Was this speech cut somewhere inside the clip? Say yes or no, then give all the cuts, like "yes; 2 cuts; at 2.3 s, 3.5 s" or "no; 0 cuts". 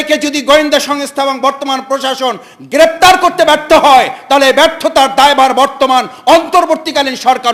no; 0 cuts